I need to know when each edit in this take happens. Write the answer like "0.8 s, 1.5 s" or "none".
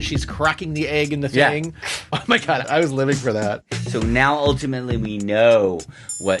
2.6 s, 3.7 s